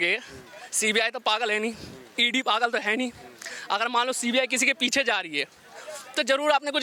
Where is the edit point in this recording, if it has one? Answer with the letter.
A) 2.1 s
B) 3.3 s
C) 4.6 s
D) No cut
D